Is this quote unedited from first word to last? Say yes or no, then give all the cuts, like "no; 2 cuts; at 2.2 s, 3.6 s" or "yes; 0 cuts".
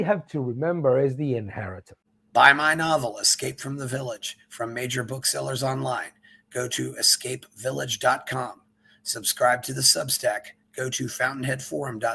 no; 1 cut; at 2.1 s